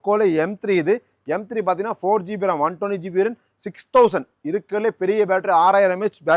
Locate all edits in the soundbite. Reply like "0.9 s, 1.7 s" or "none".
none